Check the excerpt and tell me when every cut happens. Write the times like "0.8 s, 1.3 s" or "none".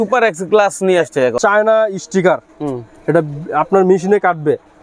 1.3 s